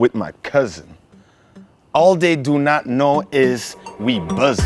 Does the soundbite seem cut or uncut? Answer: uncut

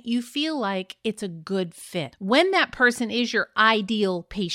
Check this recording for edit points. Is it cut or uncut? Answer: cut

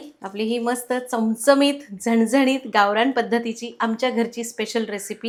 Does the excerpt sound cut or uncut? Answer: uncut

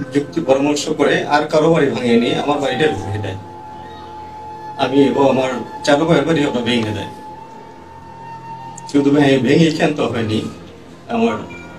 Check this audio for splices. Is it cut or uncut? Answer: uncut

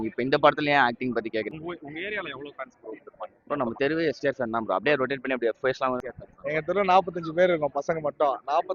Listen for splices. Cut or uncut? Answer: cut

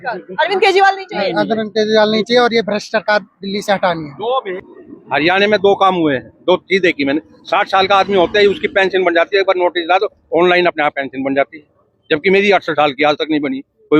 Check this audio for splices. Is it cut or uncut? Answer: cut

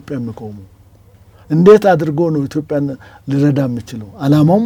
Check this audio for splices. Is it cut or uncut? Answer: uncut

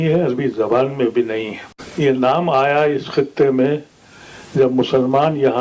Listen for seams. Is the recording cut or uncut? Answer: cut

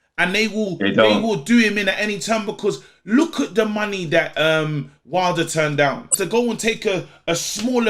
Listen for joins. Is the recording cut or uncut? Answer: cut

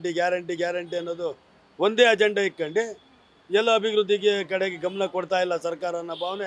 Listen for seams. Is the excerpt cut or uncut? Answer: uncut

